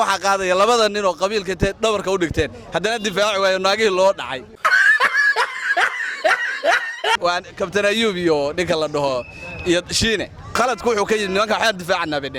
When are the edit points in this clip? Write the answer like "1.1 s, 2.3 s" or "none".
10.5 s